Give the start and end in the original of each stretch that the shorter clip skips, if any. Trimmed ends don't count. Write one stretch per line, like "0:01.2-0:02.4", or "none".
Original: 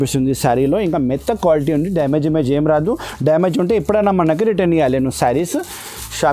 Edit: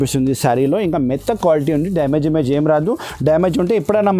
none